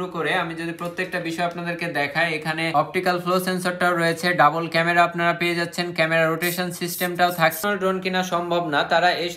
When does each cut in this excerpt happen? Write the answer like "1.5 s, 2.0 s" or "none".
2.7 s, 7.6 s

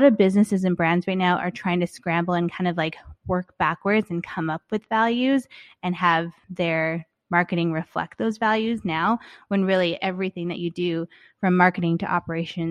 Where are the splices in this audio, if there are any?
6.4 s

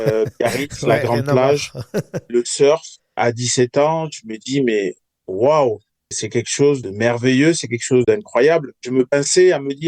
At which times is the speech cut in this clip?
none

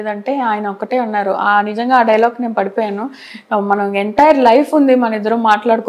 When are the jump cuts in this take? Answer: none

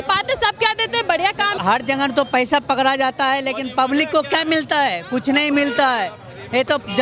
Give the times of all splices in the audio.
1.5 s

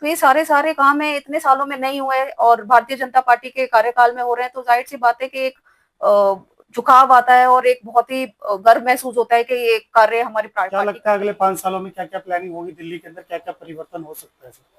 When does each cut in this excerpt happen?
10.6 s

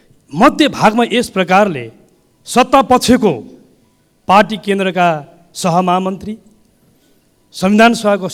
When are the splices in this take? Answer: none

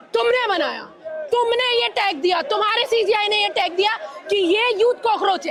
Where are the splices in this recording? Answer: none

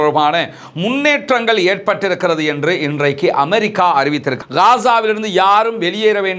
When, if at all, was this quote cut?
4.4 s

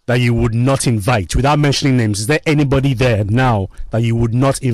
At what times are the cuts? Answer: none

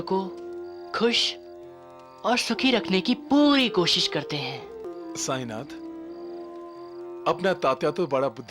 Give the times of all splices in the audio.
4.9 s

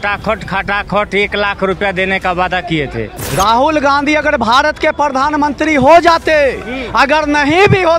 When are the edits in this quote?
3.3 s

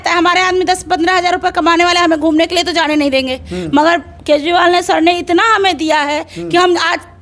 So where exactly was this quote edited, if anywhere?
none

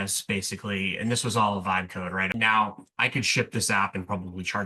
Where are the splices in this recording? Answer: 2.3 s

